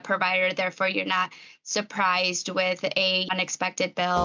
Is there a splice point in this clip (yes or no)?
yes